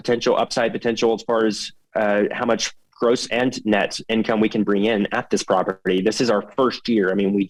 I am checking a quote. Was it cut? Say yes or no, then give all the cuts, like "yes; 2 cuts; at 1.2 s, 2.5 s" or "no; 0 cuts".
no; 0 cuts